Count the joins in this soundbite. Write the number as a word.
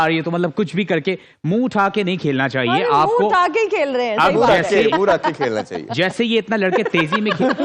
zero